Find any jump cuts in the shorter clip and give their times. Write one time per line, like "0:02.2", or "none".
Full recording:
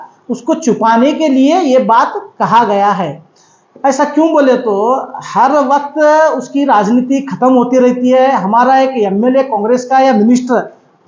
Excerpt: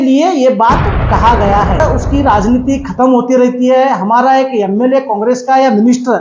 0:01.8